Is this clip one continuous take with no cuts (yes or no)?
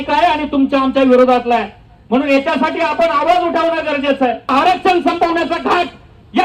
no